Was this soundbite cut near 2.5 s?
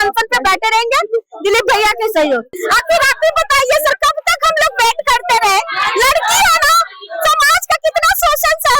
yes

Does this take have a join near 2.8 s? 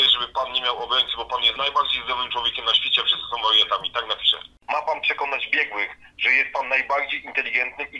no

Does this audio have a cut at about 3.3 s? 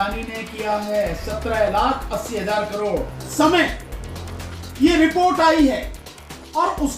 yes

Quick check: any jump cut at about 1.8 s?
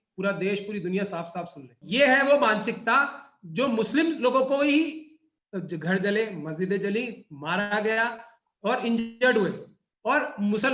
yes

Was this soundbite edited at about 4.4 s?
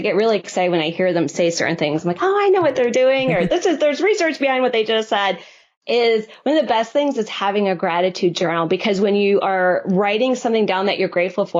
no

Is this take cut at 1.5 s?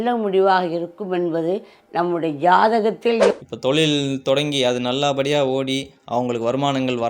no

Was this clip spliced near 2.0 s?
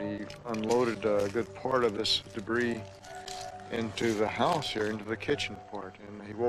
no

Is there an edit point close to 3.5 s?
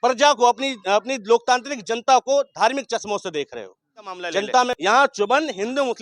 no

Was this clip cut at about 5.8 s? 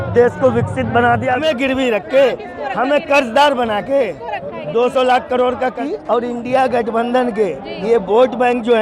yes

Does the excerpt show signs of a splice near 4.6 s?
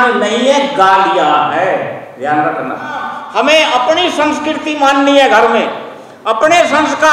no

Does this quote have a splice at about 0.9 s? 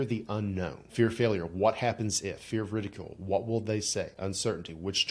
yes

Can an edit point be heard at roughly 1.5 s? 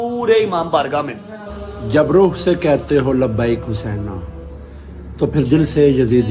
yes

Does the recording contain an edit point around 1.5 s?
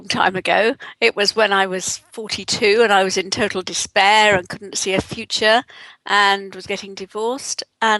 yes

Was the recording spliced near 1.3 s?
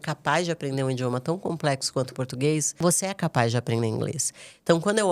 no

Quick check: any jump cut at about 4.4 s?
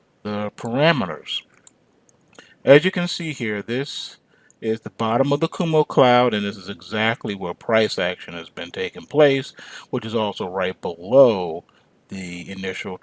yes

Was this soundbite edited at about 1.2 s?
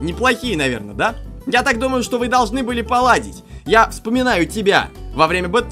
no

